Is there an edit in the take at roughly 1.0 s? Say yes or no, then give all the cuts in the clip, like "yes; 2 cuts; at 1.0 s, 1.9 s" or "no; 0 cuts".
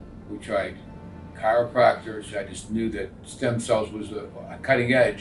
no; 1 cut; at 2.3 s